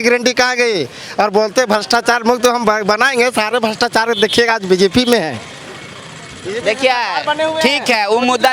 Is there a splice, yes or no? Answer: no